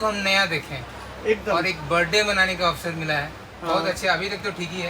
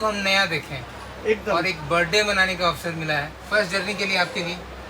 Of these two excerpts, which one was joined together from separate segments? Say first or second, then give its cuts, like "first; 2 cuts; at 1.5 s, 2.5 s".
second; 1 cut; at 3.4 s